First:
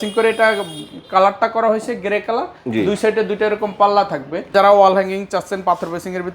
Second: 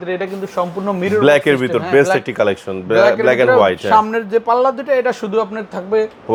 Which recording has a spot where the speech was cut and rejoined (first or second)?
first